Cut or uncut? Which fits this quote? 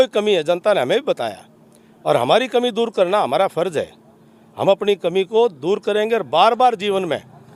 uncut